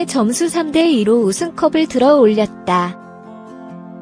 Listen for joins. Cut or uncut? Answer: uncut